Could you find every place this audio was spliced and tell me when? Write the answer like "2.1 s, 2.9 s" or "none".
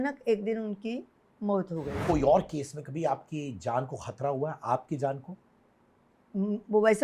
2.0 s